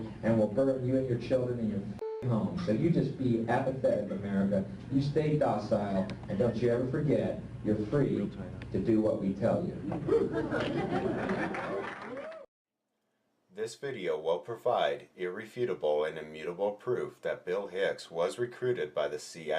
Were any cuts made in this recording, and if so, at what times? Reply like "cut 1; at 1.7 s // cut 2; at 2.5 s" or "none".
cut 1; at 17.5 s